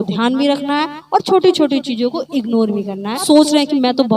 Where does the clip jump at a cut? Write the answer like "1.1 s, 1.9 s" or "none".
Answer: 3.2 s